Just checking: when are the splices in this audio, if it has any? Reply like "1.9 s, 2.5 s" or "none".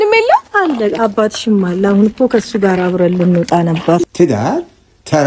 4.0 s